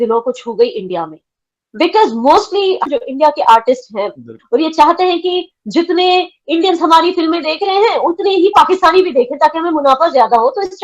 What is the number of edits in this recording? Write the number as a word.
two